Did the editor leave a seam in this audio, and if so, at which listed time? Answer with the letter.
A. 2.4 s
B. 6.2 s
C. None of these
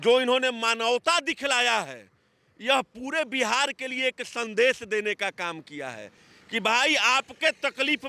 C